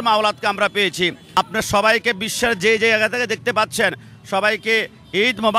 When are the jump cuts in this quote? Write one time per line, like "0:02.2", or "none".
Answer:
none